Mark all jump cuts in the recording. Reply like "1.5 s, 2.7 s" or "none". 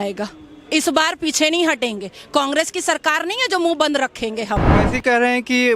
4.7 s

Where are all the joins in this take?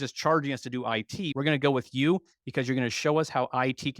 1.3 s

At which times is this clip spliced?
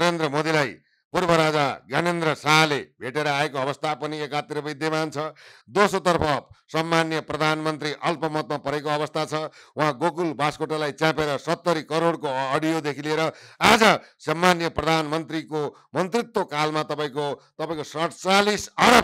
none

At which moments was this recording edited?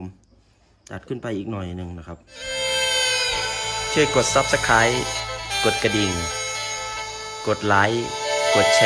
2.4 s

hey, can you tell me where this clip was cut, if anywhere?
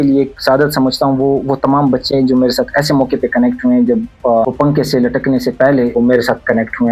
4.5 s, 5.9 s

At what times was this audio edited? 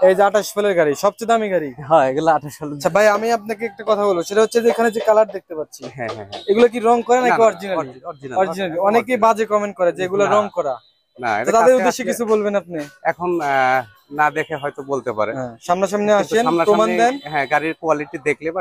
2.8 s

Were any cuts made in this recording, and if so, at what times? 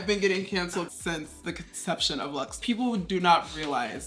0.9 s, 2.6 s

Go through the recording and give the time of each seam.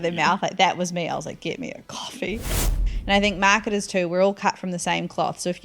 2.8 s

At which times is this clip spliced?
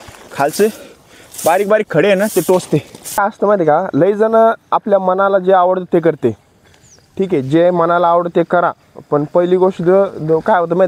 3.2 s

